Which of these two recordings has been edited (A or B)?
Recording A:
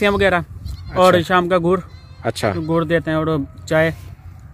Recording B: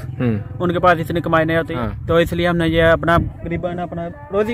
B